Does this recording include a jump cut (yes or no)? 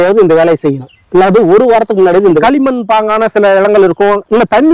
yes